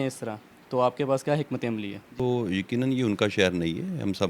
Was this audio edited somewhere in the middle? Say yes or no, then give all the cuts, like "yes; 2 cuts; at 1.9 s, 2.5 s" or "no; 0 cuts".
yes; 1 cut; at 2.2 s